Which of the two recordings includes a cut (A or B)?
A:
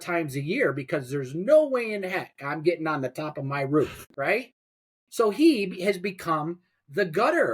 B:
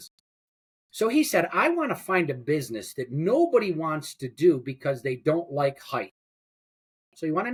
A